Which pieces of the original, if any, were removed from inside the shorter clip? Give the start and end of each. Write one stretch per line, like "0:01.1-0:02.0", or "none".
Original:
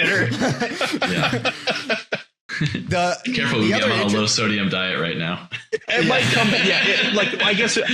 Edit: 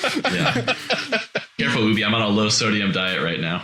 0:02.3-0:03.3